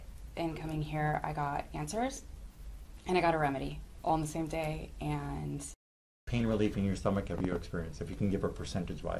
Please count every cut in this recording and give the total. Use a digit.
1